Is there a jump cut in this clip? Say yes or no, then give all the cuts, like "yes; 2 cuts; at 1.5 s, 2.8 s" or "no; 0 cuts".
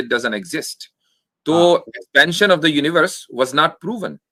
no; 0 cuts